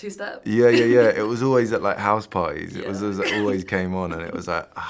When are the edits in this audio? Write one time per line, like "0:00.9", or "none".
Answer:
none